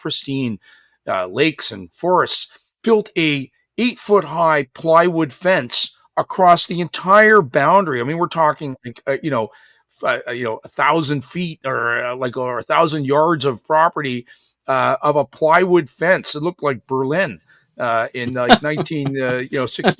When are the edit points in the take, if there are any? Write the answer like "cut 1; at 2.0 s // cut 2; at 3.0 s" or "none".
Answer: none